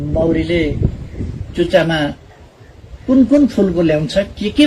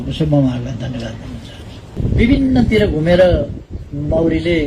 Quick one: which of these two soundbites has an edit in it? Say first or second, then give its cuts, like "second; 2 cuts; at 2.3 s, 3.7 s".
second; 1 cut; at 2.0 s